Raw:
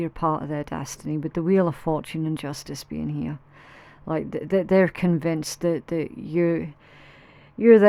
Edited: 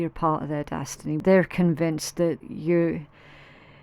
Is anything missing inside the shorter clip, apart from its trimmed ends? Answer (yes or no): yes